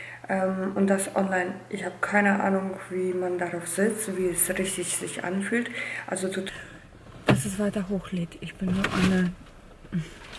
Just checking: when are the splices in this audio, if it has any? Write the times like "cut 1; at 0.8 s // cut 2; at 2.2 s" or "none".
cut 1; at 6.5 s